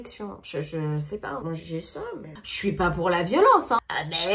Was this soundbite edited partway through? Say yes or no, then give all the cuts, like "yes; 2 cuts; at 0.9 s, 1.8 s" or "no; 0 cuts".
no; 0 cuts